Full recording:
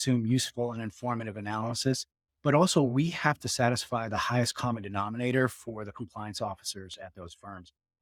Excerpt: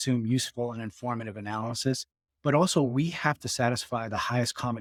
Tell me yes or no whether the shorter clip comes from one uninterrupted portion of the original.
yes